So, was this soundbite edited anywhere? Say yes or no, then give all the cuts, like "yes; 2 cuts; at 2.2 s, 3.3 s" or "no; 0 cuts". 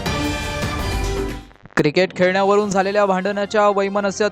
yes; 1 cut; at 1.4 s